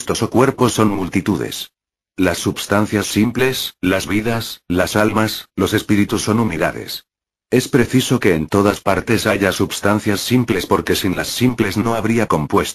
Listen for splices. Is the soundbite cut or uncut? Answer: cut